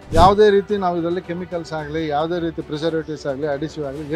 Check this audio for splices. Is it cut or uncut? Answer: uncut